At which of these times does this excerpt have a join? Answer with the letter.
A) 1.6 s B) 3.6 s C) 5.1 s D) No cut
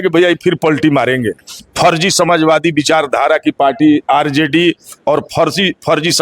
A